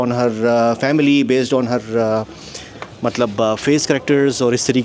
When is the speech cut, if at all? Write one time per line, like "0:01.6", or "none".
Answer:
none